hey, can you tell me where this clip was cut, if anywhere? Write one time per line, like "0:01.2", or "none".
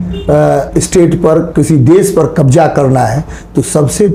none